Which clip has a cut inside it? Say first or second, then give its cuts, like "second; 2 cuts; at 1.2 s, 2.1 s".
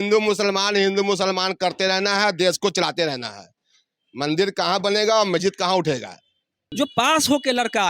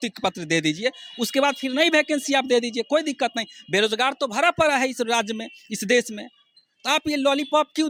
first; 1 cut; at 6.6 s